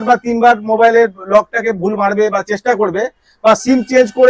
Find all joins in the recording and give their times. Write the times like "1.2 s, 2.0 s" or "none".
none